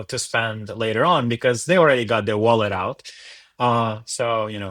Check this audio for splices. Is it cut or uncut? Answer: uncut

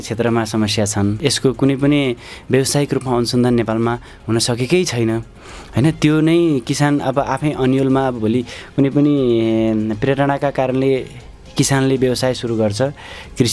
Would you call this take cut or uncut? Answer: cut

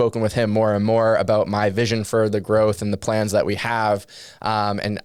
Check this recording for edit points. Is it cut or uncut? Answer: uncut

